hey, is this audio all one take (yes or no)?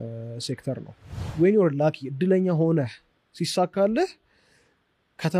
no